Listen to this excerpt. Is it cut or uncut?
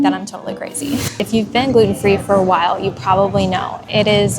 cut